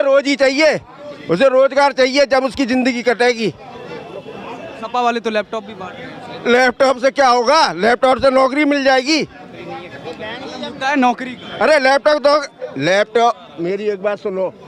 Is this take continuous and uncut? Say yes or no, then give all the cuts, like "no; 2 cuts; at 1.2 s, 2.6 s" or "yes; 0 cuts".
yes; 0 cuts